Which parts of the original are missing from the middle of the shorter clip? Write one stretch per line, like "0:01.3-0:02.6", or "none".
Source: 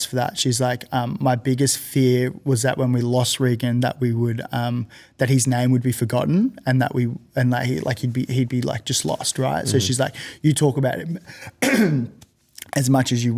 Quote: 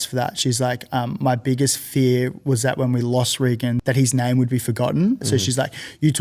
0:03.8-0:05.1
0:06.6-0:09.7